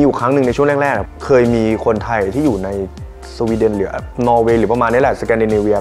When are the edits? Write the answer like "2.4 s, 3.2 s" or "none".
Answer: 1.1 s